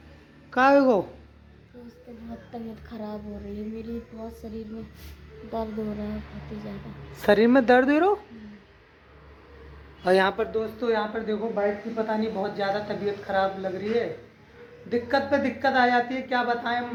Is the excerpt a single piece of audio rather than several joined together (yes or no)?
yes